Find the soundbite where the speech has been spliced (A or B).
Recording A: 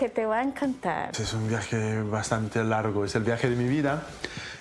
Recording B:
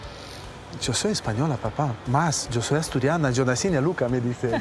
A